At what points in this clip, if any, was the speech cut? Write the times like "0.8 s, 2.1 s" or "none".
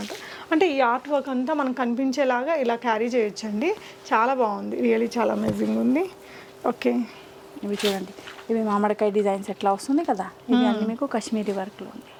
none